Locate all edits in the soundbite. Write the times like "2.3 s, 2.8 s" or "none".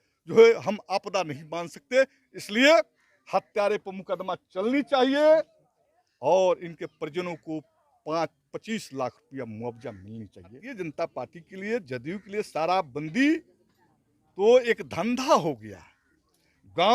10.7 s

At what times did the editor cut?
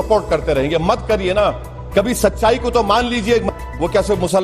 3.5 s

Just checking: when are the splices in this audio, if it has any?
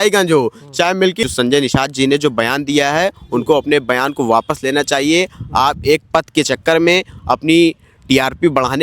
1.2 s

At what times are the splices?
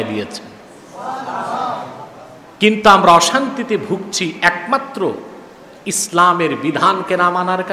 none

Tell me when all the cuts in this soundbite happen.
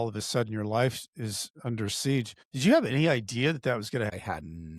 2.4 s, 4.1 s

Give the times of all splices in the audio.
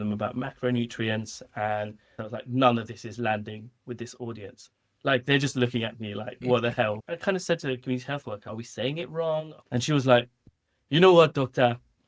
2.2 s, 6.9 s, 8.5 s, 9.6 s

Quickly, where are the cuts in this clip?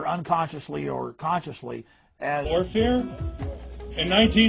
none

